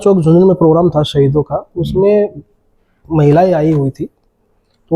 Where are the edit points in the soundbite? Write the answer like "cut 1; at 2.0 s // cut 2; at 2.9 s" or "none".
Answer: none